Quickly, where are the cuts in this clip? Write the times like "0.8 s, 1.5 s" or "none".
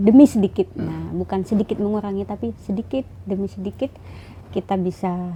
none